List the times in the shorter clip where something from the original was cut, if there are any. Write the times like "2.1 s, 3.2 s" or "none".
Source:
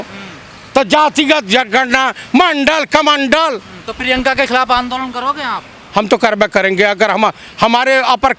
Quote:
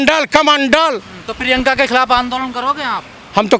none